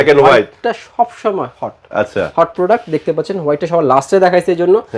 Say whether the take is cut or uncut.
uncut